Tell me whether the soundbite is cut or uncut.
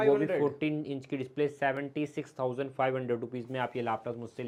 uncut